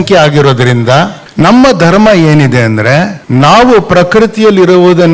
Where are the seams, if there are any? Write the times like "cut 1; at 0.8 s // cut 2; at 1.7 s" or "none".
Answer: cut 1; at 1.2 s // cut 2; at 3.2 s